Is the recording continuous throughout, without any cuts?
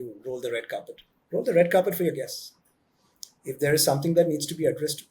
yes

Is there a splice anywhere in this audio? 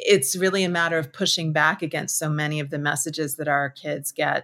no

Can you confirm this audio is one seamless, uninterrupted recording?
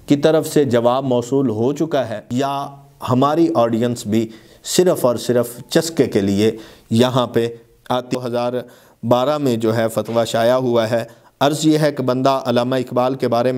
no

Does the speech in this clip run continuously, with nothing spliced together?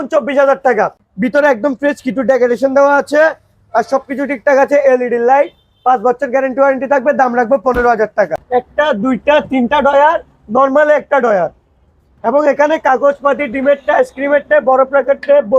no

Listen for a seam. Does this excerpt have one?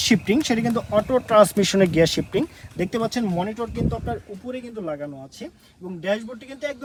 no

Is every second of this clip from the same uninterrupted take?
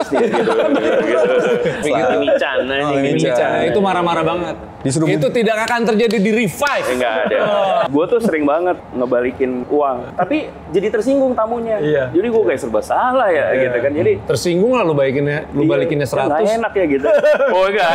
no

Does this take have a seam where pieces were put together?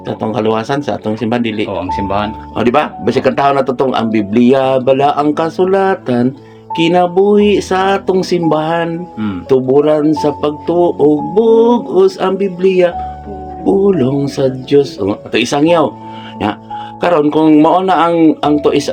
no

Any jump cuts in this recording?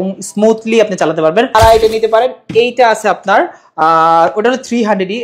yes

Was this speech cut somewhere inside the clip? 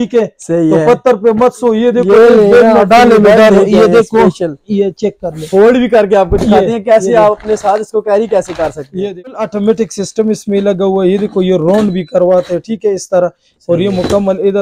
yes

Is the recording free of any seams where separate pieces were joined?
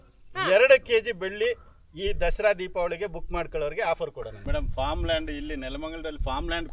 no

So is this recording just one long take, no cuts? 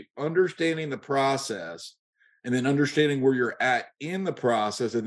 yes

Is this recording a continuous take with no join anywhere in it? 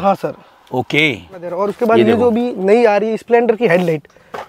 no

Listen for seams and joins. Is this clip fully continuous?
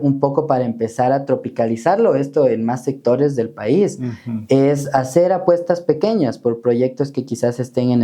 yes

